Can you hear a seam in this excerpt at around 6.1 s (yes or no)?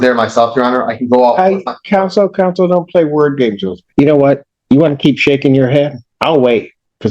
yes